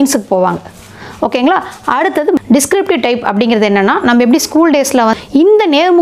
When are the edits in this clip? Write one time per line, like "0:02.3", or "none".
0:02.4
0:05.1